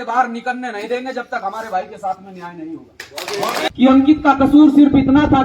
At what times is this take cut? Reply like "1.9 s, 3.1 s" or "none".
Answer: 3.6 s